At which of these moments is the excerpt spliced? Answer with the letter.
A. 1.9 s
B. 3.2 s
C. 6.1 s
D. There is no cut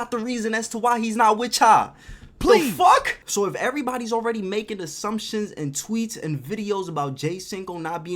B